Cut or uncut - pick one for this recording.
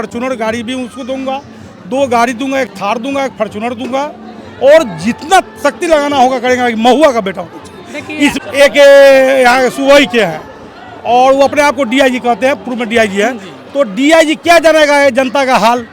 cut